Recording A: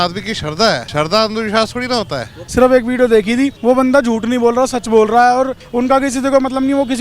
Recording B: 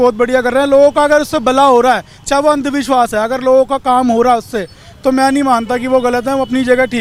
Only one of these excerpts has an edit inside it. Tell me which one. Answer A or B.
A